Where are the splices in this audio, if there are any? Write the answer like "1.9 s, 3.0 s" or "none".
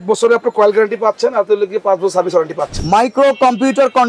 2.8 s